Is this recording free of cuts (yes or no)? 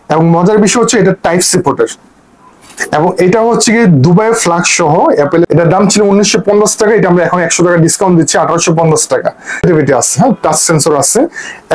no